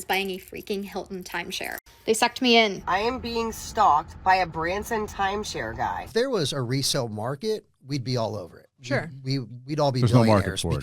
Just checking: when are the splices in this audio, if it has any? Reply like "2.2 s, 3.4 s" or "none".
2.8 s, 6.0 s